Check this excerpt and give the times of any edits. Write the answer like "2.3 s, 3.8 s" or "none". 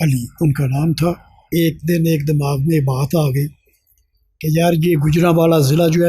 1.3 s

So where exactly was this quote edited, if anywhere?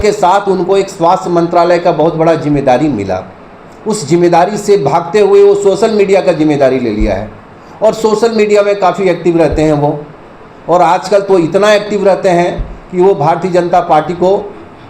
none

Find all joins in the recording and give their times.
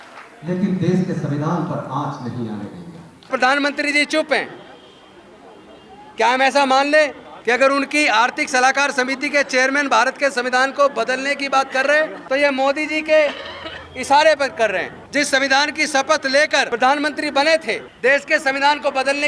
3.3 s, 7.3 s, 12.2 s, 15.0 s, 16.7 s, 17.9 s

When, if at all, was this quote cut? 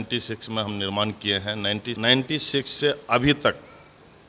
1.9 s

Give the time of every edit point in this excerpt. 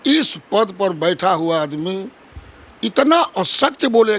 none

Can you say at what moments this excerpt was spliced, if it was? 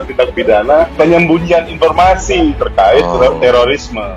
0.9 s

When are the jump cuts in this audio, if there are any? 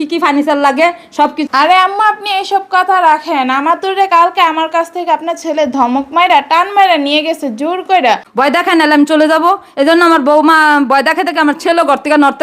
1.4 s, 8.3 s

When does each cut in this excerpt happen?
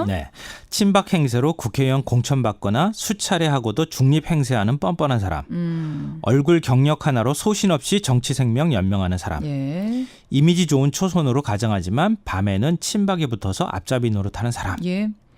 2.7 s

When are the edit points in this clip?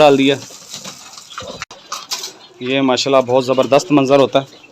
2.0 s

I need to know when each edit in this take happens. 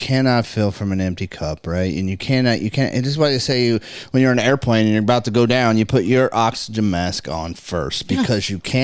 none

